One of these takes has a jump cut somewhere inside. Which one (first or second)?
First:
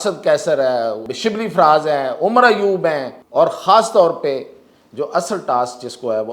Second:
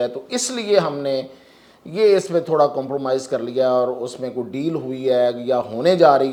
first